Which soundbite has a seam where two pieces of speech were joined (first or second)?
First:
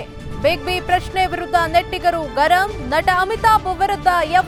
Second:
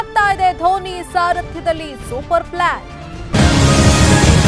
second